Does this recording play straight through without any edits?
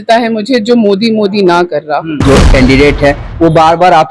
no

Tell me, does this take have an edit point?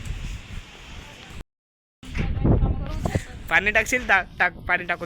yes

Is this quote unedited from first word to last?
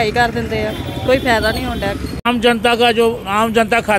no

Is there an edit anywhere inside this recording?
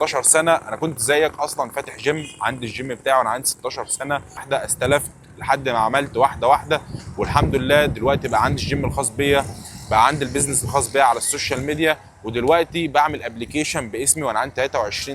yes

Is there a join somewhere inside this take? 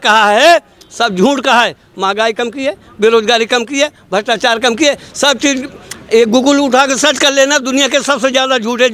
no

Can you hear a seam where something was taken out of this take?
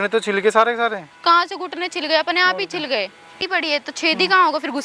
yes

